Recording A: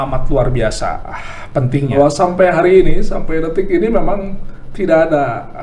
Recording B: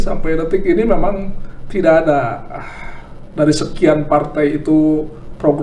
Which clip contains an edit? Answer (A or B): A